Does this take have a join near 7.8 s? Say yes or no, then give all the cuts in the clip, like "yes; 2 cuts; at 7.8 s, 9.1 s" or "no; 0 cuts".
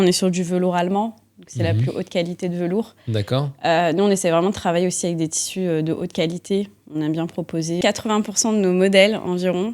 yes; 1 cut; at 7.8 s